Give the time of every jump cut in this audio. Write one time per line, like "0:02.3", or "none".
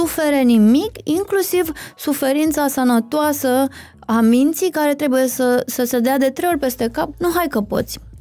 0:07.1